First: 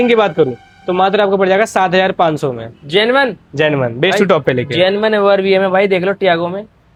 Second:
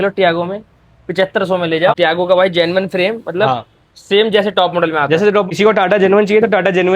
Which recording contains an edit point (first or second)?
second